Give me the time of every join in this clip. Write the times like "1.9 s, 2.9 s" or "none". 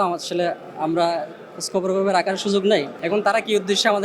3.0 s

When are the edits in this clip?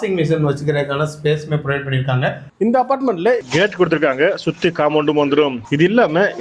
2.5 s, 3.4 s

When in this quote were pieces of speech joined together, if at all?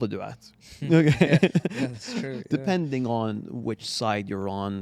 none

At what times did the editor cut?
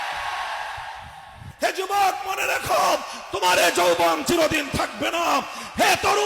1.4 s

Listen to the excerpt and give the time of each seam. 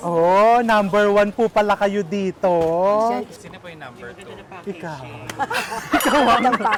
none

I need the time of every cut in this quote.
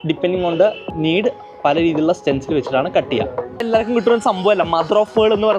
0.9 s, 3.6 s

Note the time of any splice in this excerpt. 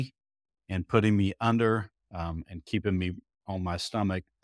none

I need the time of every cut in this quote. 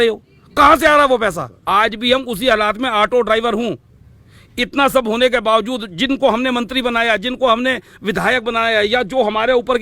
1.5 s

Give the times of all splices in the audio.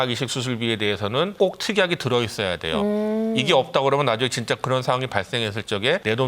none

